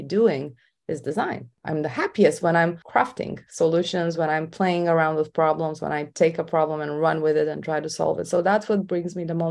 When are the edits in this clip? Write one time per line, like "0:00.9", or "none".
0:01.5